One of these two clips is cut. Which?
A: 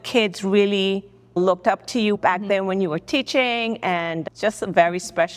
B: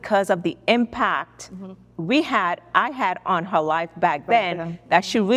A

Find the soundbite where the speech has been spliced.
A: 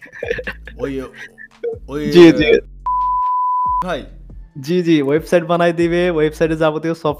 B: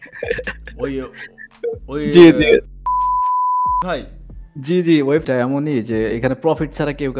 B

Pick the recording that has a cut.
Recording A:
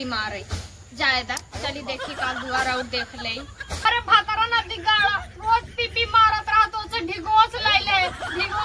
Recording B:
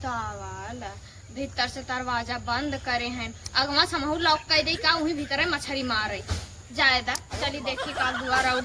A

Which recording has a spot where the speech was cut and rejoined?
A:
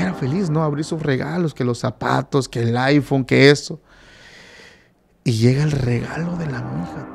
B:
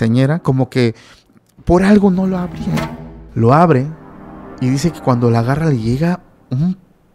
B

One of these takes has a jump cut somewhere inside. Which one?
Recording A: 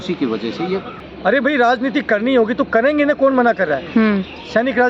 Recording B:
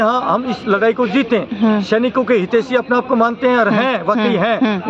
A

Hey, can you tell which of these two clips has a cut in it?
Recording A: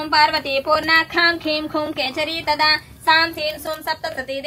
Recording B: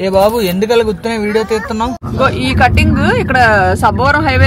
B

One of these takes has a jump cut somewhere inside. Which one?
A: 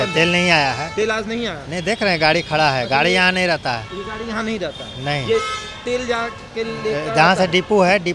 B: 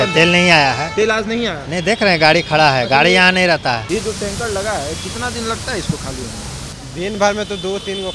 B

